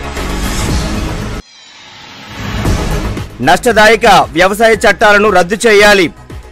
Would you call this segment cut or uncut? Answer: cut